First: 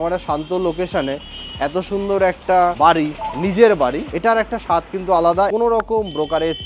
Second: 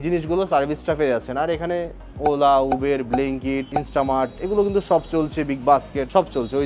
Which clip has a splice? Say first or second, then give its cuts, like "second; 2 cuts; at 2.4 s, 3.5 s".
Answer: first; 1 cut; at 5.5 s